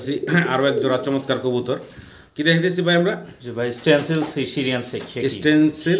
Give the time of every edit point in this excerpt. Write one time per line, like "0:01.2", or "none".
none